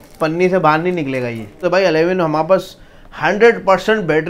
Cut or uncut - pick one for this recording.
cut